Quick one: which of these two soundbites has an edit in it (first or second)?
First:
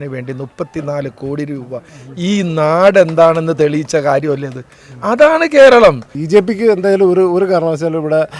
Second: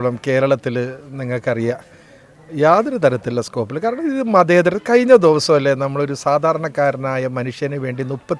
first